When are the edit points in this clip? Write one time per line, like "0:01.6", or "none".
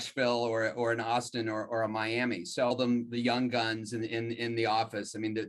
0:02.7